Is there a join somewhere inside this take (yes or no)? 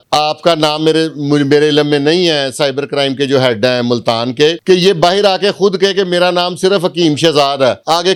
no